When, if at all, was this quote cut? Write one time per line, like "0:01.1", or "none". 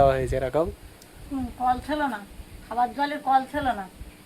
0:01.2